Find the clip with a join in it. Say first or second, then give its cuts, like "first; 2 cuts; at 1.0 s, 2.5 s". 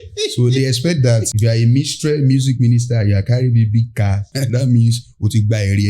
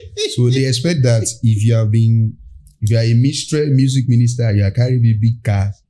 first; 2 cuts; at 1.3 s, 4.3 s